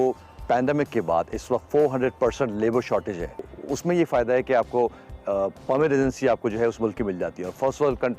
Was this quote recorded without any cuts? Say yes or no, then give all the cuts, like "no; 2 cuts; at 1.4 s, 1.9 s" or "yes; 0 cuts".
no; 1 cut; at 3.5 s